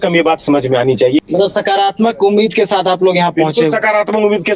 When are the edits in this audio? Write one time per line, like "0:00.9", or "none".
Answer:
0:01.2